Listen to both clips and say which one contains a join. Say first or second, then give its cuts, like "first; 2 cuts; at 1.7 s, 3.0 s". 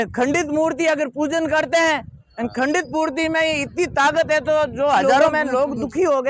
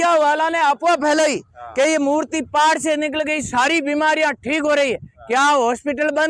first; 1 cut; at 5.3 s